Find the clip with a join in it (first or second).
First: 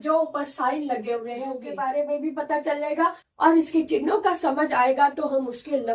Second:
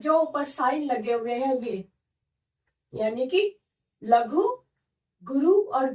first